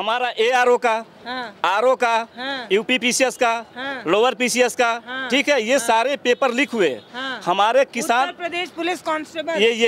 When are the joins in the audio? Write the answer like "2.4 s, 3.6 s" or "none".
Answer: none